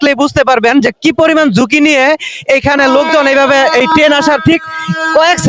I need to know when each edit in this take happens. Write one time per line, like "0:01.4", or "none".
none